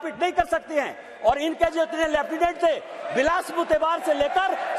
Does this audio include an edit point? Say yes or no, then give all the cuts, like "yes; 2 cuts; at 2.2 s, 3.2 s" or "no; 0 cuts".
no; 0 cuts